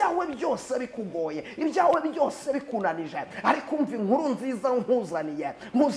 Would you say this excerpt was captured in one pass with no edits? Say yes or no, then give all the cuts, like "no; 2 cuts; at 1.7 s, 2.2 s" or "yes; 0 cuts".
yes; 0 cuts